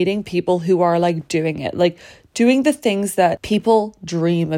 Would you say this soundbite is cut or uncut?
cut